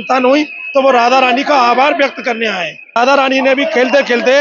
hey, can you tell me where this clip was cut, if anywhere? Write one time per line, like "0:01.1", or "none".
0:03.0